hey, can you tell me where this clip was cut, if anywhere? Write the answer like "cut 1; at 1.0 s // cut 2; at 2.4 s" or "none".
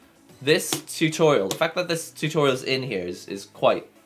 none

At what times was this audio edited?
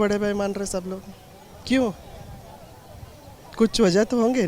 none

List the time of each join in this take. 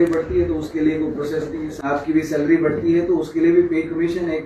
cut 1; at 1.8 s

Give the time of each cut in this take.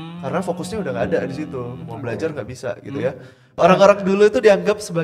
cut 1; at 3.6 s

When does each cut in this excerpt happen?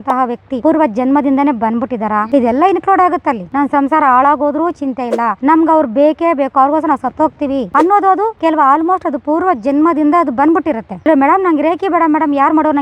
cut 1; at 3.4 s // cut 2; at 10.9 s

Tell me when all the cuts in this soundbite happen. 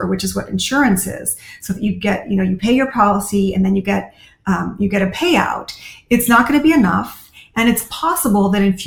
none

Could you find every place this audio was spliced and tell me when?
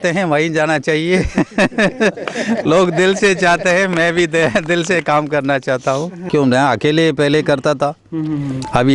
cut 1; at 6.3 s

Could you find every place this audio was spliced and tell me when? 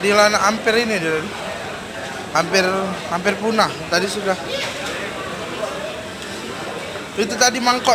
cut 1; at 5.7 s

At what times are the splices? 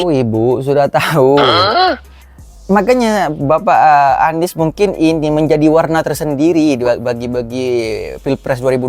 none

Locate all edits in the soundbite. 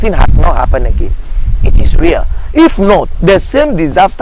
none

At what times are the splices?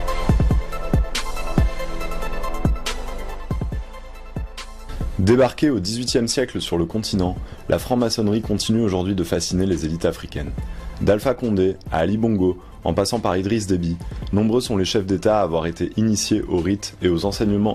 cut 1; at 13.4 s

